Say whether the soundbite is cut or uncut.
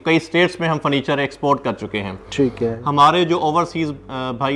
uncut